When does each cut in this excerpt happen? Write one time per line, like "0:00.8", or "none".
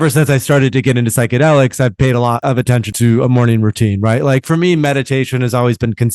0:02.8

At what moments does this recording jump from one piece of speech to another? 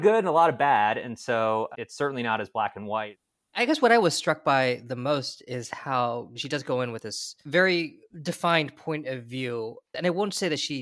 0:01.8
0:03.6
0:06.4
0:07.4
0:09.9

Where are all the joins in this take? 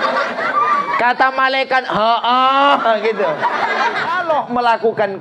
0:04.2

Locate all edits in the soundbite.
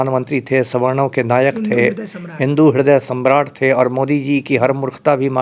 none

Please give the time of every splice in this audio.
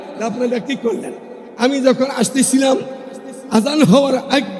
none

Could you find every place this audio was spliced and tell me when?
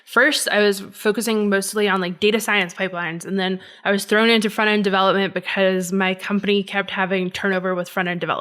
none

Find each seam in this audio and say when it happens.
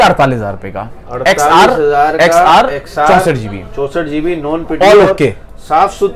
none

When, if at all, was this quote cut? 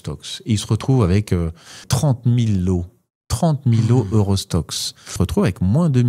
0:01.9
0:05.1

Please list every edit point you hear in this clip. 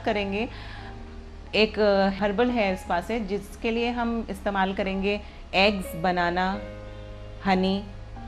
0:02.2

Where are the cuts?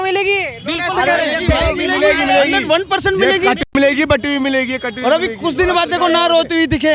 none

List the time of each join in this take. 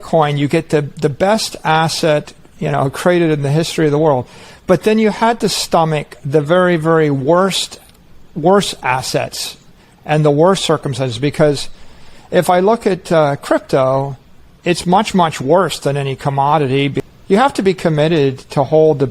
0:17.0

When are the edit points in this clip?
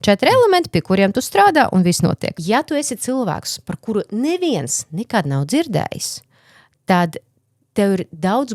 0:02.3

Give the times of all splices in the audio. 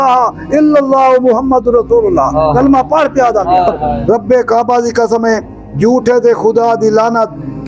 0:03.9

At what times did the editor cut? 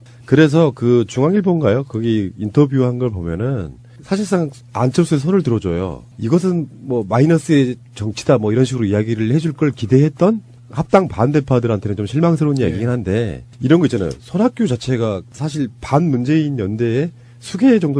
0:14.5

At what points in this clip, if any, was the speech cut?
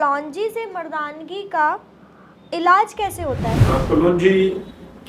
0:03.6

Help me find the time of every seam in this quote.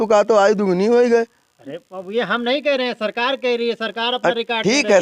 none

